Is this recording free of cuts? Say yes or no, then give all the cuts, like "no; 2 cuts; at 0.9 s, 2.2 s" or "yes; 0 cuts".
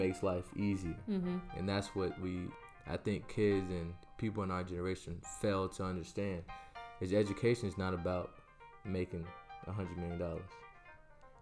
no; 2 cuts; at 2.6 s, 4.0 s